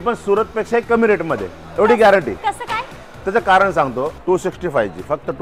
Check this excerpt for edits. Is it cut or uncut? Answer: cut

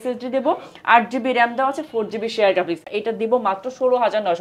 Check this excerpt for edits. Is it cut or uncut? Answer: cut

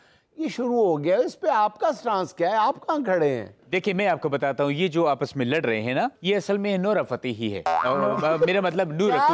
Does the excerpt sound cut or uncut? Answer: cut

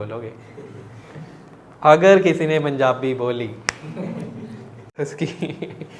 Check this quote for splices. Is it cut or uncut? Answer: cut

